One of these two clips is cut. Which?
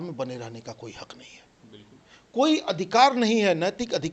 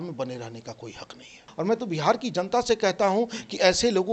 second; 1 cut; at 1.5 s

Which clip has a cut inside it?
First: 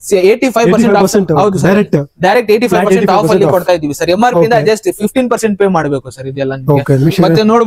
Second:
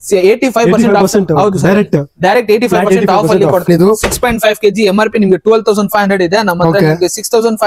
second; 1 cut; at 3.7 s

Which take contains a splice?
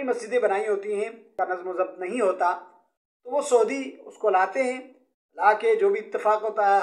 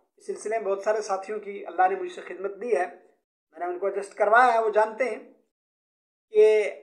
first; 1 cut; at 1.2 s

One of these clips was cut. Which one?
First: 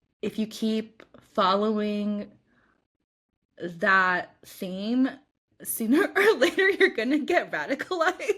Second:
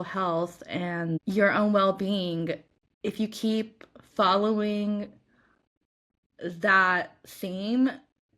second; 1 cut; at 1.2 s

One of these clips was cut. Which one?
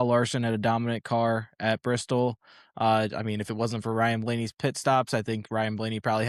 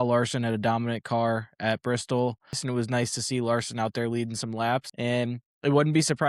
second; 2 cuts; at 2.6 s, 4.9 s

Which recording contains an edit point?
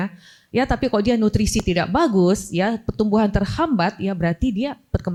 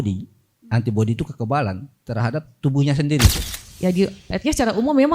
second; 1 cut; at 3.5 s

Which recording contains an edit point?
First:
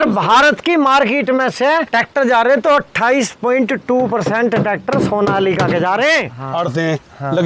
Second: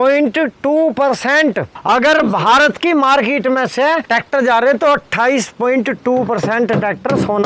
first; 1 cut; at 6.3 s

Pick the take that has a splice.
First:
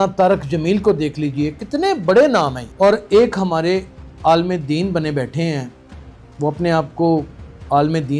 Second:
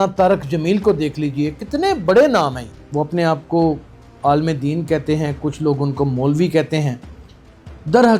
second; 1 cut; at 2.6 s

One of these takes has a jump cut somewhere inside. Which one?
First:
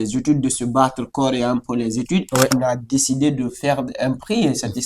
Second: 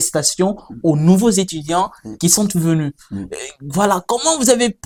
first; 1 cut; at 2.5 s

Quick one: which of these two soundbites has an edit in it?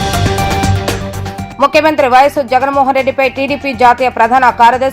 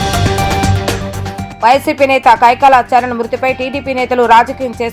second; 1 cut; at 0.9 s

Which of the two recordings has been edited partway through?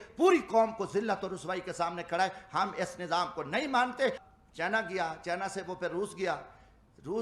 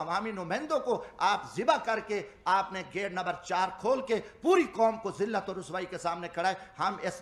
first; 1 cut; at 4.3 s

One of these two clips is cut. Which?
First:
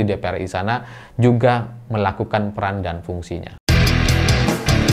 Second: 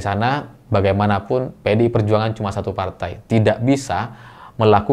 first; 1 cut; at 3.5 s

